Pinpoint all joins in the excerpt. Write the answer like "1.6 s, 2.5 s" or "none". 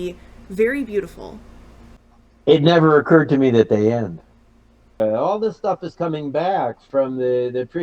5.0 s, 6.8 s